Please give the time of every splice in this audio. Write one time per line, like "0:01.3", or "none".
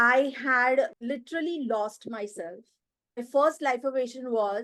0:01.0
0:03.2